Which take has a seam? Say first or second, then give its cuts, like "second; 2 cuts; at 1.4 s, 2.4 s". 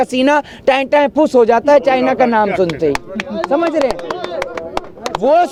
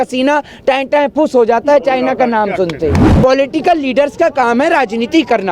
second; 1 cut; at 3.0 s